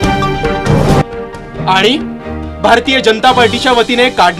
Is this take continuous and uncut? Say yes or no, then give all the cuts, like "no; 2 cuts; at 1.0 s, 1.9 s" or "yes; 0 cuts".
no; 1 cut; at 1.0 s